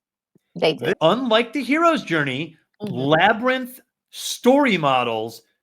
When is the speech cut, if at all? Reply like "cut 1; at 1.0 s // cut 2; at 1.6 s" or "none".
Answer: cut 1; at 0.9 s

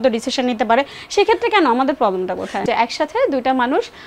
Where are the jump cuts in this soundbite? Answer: cut 1; at 2.6 s

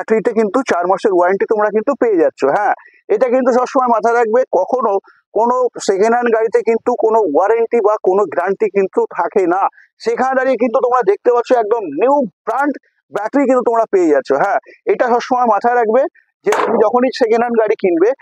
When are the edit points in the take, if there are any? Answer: none

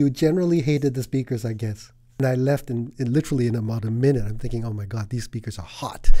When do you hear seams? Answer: cut 1; at 2.0 s

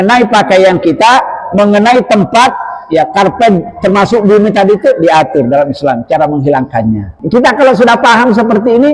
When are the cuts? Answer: cut 1; at 7.2 s

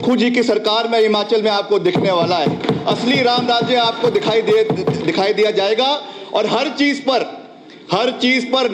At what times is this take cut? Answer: none

